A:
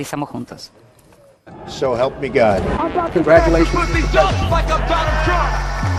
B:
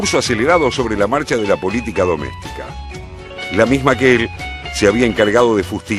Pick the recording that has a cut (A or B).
B